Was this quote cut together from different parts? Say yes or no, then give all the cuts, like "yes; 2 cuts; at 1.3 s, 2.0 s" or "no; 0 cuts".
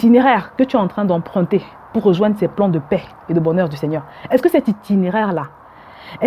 no; 0 cuts